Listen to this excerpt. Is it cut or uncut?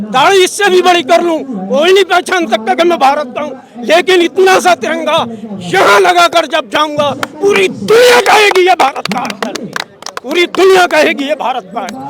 uncut